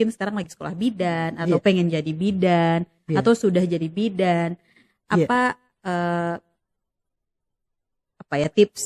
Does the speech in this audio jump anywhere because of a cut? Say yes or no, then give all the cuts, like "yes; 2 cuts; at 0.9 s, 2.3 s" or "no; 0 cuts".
no; 0 cuts